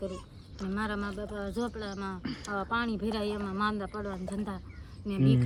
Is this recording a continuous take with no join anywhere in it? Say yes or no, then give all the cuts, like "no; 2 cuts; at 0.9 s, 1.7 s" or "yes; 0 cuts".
yes; 0 cuts